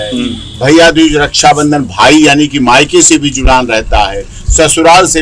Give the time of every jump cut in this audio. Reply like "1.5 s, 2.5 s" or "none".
none